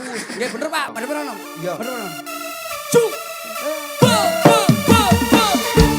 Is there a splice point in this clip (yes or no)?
yes